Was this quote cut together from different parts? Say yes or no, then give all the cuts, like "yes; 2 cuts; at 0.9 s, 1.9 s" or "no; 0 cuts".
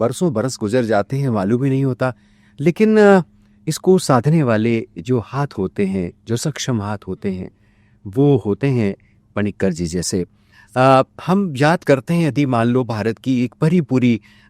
no; 0 cuts